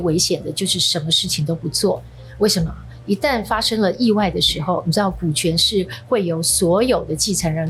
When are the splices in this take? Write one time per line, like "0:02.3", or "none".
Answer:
none